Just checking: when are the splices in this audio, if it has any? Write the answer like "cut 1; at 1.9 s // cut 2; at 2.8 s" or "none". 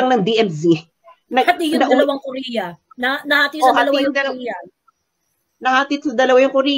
none

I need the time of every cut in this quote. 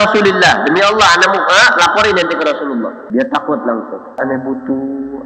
cut 1; at 3.0 s // cut 2; at 4.1 s

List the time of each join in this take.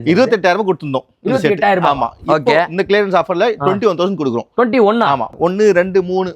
cut 1; at 5.3 s

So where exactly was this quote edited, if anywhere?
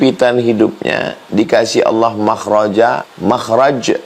cut 1; at 3.1 s

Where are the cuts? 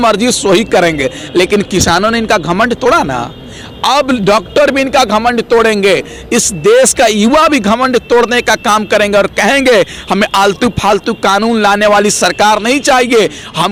none

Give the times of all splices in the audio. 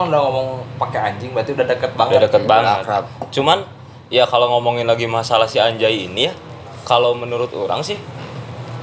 none

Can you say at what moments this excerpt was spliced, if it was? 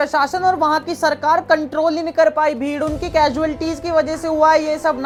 none

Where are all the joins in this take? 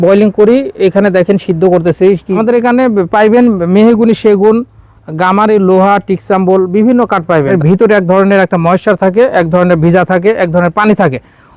cut 1; at 2.3 s // cut 2; at 7.5 s

